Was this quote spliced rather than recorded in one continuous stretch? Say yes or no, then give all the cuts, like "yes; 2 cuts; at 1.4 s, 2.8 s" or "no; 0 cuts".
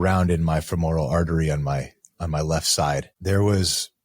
yes; 1 cut; at 3.1 s